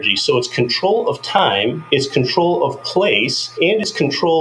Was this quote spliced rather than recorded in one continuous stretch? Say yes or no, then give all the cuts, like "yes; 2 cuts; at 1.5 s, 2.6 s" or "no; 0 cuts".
yes; 2 cuts; at 1.8 s, 3.4 s